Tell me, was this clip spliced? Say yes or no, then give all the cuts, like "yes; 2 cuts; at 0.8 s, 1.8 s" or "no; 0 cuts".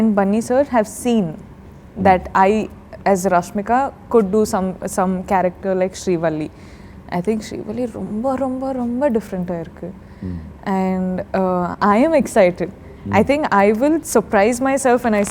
no; 0 cuts